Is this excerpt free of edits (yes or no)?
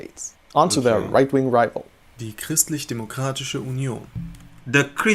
yes